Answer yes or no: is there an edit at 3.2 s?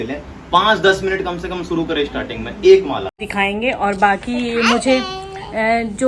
yes